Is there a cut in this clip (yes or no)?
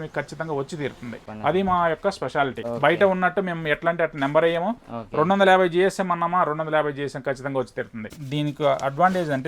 yes